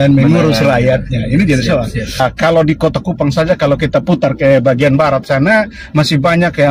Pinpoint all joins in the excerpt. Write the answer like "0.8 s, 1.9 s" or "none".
2.2 s